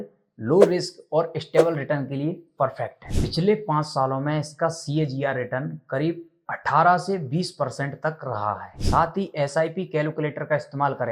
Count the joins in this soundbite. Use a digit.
2